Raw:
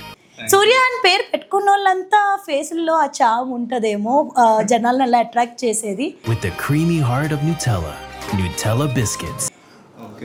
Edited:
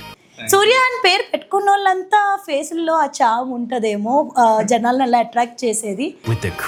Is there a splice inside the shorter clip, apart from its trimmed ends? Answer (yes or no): no